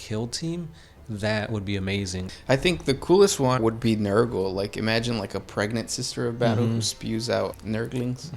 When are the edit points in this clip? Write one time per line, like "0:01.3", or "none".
0:02.3
0:03.6
0:07.6